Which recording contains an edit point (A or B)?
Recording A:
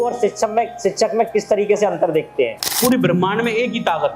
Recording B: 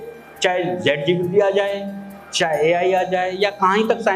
A